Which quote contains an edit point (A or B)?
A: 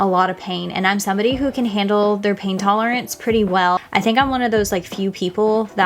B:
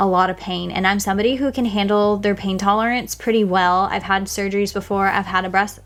A